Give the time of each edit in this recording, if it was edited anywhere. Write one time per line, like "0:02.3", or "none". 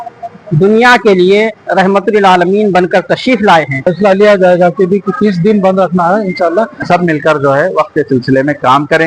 0:03.9
0:06.8